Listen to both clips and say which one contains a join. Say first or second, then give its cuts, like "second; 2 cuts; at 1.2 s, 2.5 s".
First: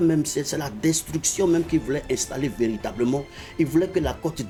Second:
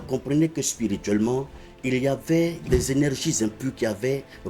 second; 1 cut; at 2.6 s